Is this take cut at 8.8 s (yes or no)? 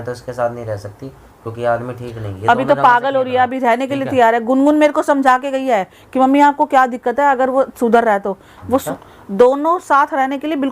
yes